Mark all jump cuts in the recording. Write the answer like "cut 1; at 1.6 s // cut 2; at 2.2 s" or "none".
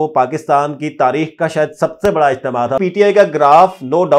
cut 1; at 2.8 s

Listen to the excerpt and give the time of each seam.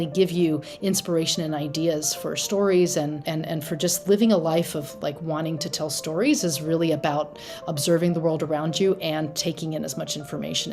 cut 1; at 3.2 s

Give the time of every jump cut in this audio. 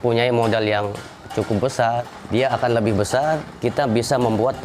cut 1; at 2.1 s // cut 2; at 3.5 s

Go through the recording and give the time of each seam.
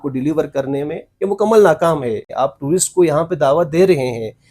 cut 1; at 2.3 s

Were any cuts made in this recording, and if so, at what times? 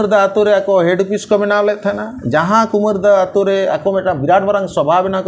none

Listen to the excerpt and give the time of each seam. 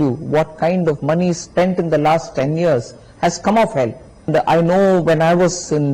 cut 1; at 4.3 s

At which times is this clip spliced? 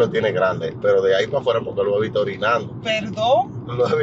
none

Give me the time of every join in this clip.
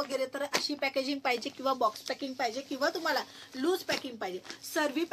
none

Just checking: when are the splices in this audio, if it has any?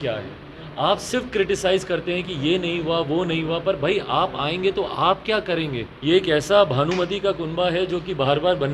cut 1; at 5.9 s

